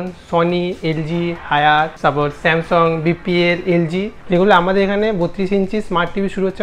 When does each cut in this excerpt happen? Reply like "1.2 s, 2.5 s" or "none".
1.9 s, 4.2 s